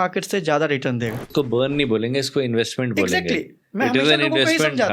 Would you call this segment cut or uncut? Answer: cut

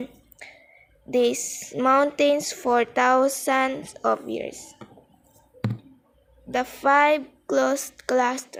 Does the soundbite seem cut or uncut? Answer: uncut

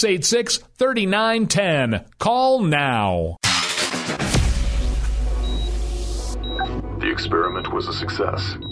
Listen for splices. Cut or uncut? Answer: cut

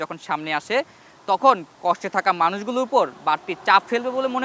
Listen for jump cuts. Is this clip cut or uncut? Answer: uncut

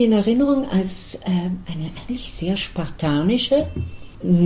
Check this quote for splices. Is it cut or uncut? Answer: uncut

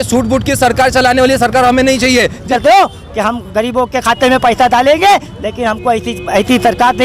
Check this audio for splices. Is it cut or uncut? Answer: cut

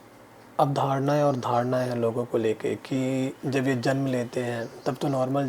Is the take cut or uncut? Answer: uncut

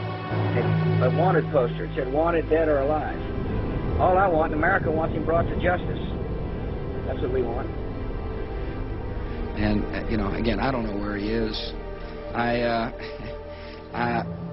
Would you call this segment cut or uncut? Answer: uncut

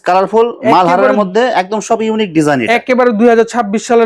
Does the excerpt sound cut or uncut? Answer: uncut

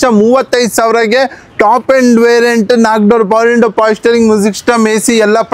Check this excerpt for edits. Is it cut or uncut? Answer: uncut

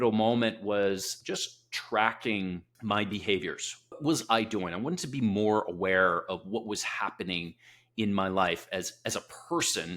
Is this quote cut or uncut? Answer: cut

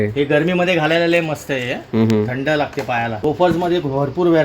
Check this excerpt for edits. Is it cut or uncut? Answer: cut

